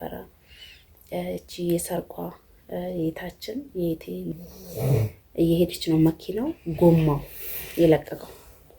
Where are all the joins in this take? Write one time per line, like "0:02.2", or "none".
0:04.3